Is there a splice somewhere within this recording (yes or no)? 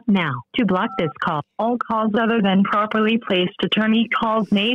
yes